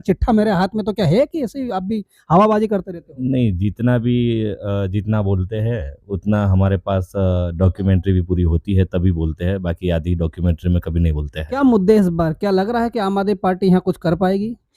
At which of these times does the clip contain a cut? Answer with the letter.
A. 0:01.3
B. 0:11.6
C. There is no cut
B